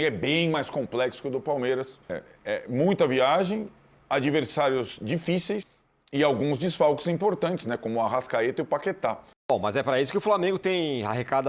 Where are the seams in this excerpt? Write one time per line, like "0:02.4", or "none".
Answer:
0:02.3
0:05.7
0:09.5